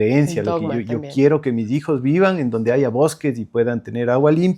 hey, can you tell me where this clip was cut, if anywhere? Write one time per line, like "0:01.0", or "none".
none